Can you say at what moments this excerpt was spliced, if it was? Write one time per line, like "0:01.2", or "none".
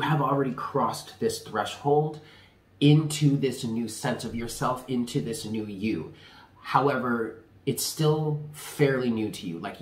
none